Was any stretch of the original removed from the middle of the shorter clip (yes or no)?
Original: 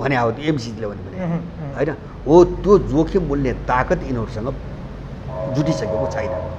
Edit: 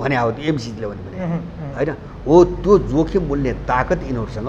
no